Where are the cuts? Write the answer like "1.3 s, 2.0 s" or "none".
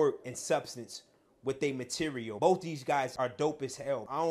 2.3 s, 3.1 s